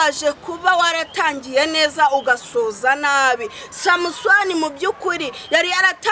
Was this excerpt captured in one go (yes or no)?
yes